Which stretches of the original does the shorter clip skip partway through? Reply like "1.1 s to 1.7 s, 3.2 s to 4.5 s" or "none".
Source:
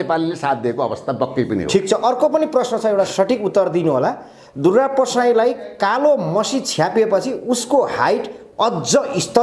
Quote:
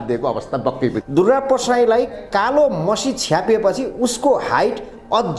1.6 s to 4.5 s